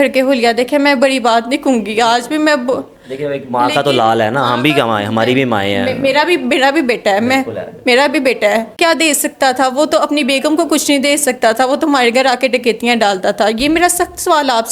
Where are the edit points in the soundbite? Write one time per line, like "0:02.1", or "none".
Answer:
0:08.8